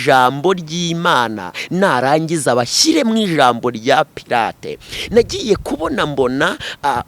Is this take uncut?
yes; 0 cuts

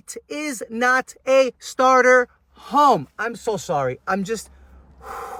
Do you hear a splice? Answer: no; 0 cuts

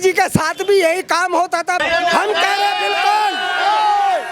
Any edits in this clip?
yes; 1 cut; at 1.8 s

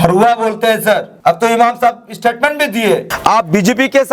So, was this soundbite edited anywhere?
yes; 2 cuts; at 1.1 s, 3.1 s

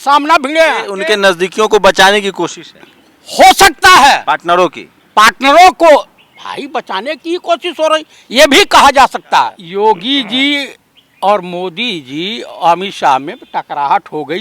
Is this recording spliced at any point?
yes; 2 cuts; at 0.9 s, 9.6 s

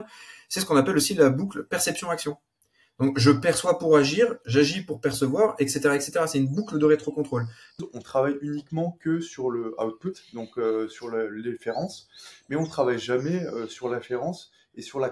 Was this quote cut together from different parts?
yes; 1 cut; at 7.6 s

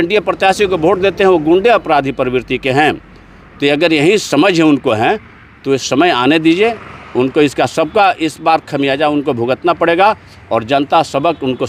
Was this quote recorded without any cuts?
yes; 0 cuts

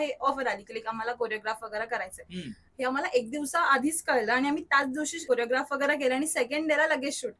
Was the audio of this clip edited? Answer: yes; 1 cut; at 5.2 s

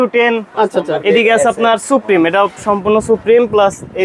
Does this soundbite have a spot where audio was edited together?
no; 0 cuts

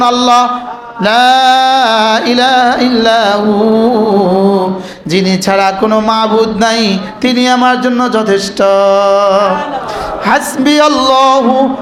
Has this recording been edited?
no; 0 cuts

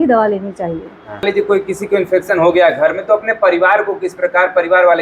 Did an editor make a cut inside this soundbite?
yes; 1 cut; at 1.2 s

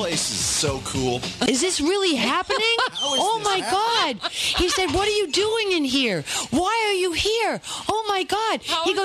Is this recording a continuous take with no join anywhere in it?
no; 1 cut; at 1.5 s

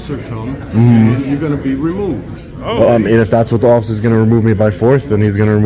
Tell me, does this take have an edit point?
no; 0 cuts

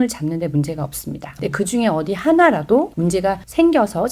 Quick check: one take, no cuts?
no; 2 cuts; at 1.3 s, 3.2 s

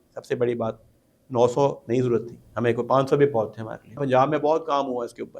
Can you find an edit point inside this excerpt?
yes; 1 cut; at 4.0 s

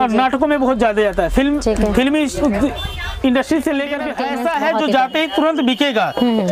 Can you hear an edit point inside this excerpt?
yes; 1 cut; at 4.1 s

